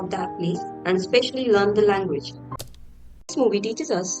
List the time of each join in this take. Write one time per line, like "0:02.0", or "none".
0:02.8